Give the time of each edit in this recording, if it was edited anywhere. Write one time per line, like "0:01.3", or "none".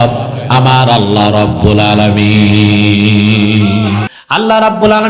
0:04.1